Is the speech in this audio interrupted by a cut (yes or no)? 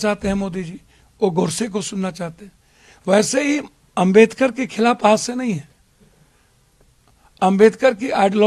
no